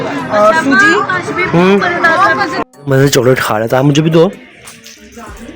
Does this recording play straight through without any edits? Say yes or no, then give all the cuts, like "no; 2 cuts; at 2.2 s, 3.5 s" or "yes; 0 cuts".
no; 1 cut; at 2.5 s